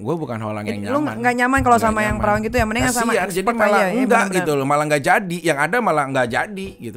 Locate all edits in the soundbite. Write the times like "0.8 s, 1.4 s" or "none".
none